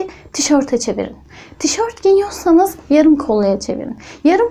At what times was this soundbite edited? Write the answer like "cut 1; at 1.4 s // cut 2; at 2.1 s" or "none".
none